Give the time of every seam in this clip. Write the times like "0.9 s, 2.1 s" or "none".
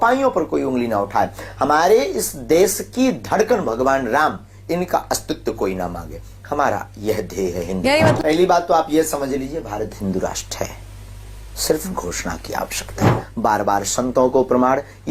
8.2 s, 13.2 s

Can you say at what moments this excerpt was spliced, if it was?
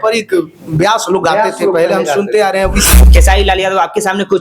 3.0 s

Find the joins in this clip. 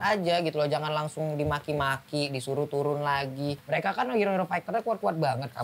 3.5 s

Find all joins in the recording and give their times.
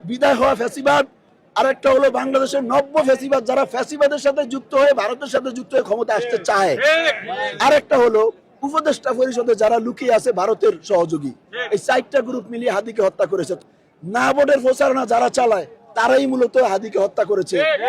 13.6 s

